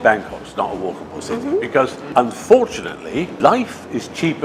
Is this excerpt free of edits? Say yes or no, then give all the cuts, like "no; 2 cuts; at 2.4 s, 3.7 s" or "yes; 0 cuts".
no; 2 cuts; at 2.0 s, 3.4 s